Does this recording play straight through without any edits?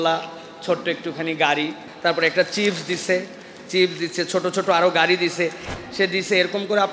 no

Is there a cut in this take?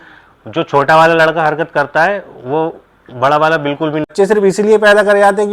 yes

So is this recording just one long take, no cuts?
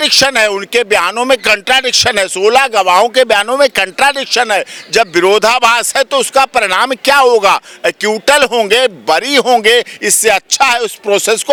yes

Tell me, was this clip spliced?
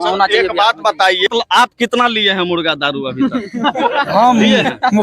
yes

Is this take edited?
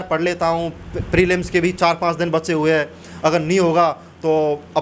no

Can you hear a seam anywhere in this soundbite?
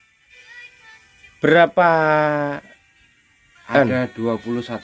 no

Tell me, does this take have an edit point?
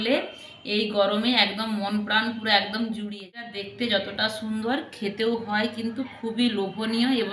yes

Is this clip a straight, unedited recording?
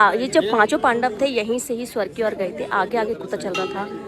yes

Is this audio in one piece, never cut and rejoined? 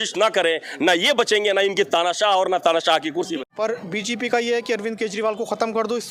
no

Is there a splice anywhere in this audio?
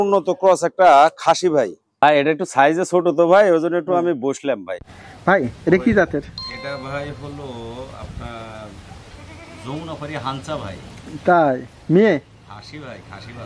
yes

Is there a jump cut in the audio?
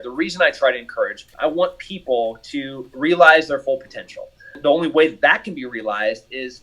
yes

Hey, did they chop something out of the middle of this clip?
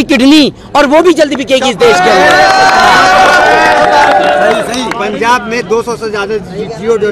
no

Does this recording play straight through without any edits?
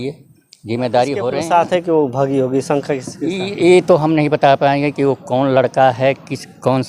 no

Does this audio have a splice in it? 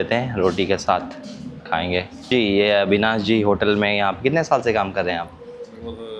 yes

